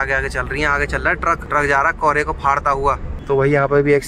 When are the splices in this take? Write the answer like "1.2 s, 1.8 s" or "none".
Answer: 1.4 s, 3.1 s